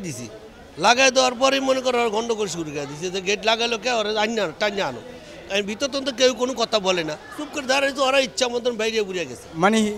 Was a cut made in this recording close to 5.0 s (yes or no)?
no